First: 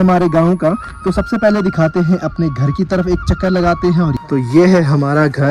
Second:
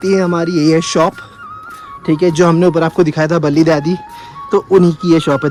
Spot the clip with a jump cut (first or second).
first